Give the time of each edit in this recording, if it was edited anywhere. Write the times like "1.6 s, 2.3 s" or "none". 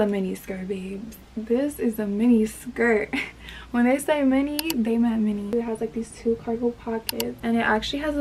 none

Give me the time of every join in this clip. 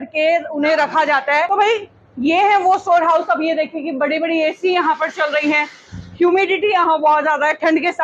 1.5 s

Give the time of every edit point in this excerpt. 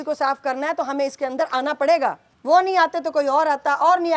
2.3 s

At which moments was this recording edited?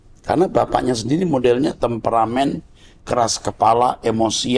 none

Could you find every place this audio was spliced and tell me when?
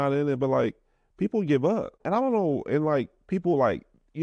2.0 s

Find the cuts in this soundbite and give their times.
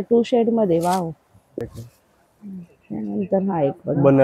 1.6 s

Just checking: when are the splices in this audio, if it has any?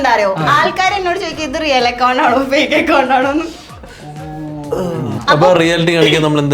5.2 s

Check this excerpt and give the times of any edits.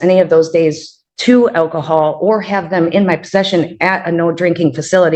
none

